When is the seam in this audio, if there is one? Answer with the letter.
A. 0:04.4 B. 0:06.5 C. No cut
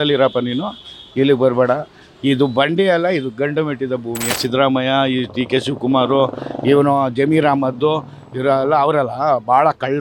A